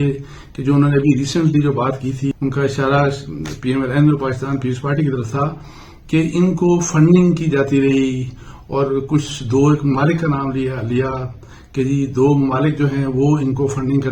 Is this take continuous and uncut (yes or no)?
no